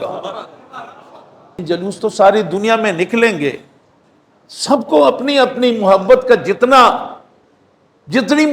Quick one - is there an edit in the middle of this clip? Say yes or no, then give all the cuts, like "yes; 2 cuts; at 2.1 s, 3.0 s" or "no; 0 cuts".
yes; 1 cut; at 1.6 s